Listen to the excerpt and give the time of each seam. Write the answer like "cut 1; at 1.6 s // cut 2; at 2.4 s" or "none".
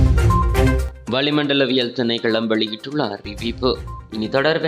cut 1; at 1.1 s